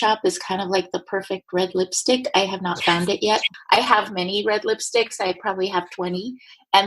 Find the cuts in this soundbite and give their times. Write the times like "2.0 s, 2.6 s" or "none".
3.5 s